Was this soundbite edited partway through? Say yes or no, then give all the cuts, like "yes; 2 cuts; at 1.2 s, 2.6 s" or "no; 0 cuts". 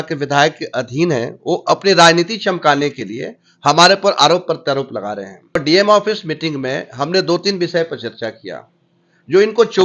yes; 1 cut; at 5.5 s